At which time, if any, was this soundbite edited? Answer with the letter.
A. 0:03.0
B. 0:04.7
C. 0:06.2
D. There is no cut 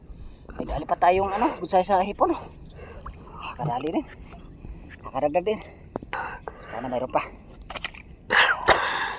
D